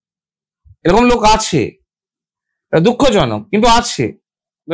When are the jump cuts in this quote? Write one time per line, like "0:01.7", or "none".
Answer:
none